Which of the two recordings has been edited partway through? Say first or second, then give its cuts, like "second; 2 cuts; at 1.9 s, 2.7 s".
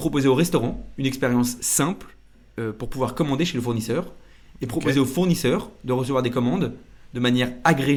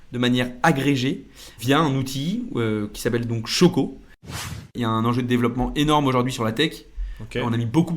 second; 1 cut; at 4.4 s